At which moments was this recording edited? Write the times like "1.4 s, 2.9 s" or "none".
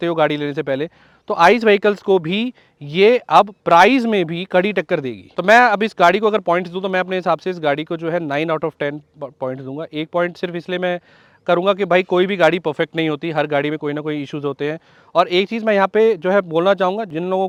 none

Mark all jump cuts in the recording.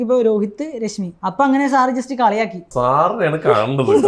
1.1 s, 2.6 s

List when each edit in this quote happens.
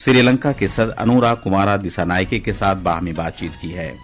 none

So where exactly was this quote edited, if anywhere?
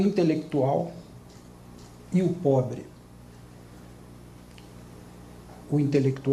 2.2 s

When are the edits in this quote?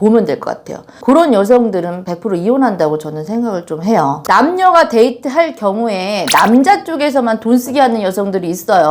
4.2 s

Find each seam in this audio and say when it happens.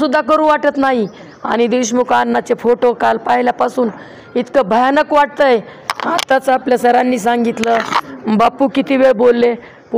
none

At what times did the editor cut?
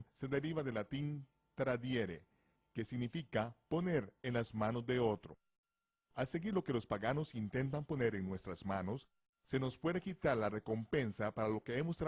5.1 s

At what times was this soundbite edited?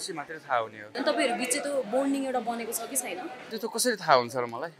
0.9 s, 3.4 s

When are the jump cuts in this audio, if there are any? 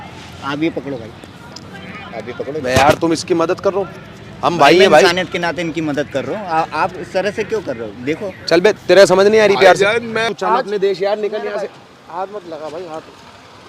10.3 s

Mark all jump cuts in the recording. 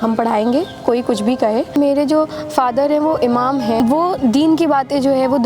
1.8 s, 4.0 s

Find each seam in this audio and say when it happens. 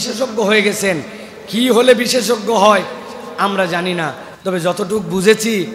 none

